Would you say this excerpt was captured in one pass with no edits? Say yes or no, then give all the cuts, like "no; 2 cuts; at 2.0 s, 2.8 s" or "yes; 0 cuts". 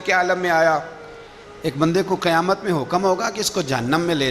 no; 1 cut; at 1.4 s